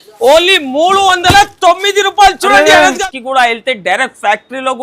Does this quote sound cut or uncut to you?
cut